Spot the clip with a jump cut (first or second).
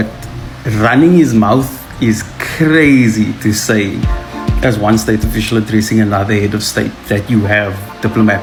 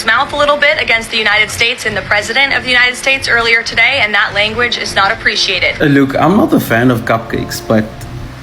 second